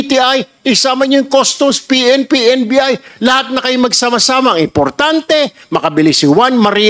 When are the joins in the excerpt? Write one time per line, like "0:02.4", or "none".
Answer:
none